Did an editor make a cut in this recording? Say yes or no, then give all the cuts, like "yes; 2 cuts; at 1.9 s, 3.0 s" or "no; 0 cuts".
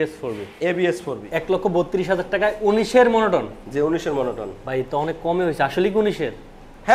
yes; 1 cut; at 1.2 s